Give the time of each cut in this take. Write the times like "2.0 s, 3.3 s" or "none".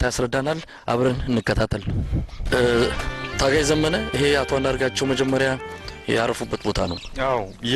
2.4 s

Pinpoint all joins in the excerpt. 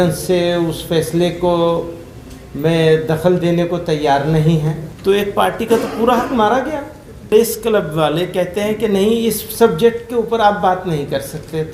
4.9 s, 7.3 s

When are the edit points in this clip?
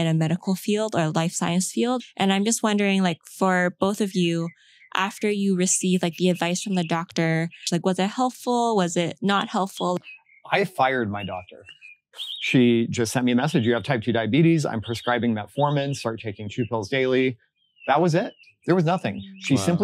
2.0 s, 7.6 s, 10.0 s, 12.1 s, 18.5 s

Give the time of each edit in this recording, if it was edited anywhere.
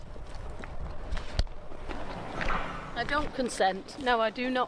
1.9 s

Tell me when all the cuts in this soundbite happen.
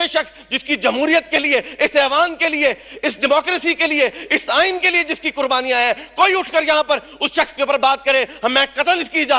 none

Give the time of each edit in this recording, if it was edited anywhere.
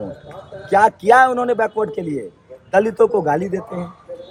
none

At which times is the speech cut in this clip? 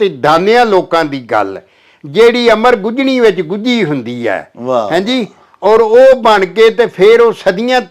none

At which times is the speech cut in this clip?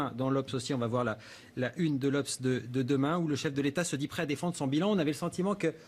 1.7 s

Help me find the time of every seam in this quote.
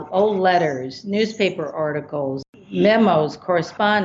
2.5 s

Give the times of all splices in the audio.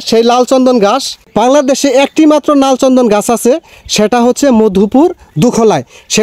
1.3 s

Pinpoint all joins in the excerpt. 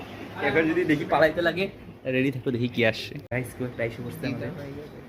3.3 s

